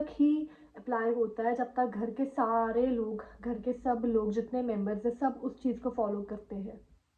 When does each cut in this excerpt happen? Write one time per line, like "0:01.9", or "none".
none